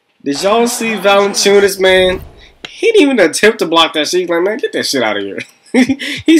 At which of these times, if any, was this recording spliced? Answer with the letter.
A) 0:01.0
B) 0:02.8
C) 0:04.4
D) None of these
D